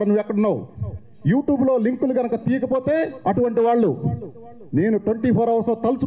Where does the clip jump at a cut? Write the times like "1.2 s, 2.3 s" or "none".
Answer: none